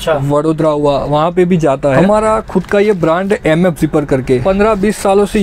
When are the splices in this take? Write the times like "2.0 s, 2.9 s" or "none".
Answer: 2.0 s, 4.4 s